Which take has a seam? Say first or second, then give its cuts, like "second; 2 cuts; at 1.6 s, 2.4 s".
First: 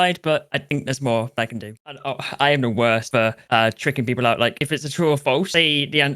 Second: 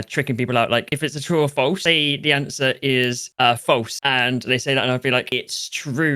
first; 1 cut; at 1.8 s